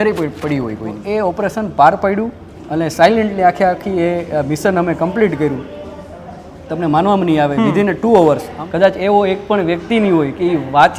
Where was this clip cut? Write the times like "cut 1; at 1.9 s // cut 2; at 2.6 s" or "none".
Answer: cut 1; at 0.9 s // cut 2; at 8.5 s